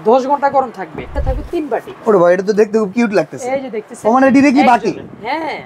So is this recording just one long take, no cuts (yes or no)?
no